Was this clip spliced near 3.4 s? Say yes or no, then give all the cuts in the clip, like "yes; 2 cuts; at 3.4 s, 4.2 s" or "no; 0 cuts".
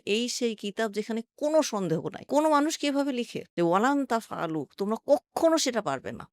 yes; 1 cut; at 3.4 s